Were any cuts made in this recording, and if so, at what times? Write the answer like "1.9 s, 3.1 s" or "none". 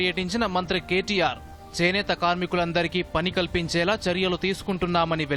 none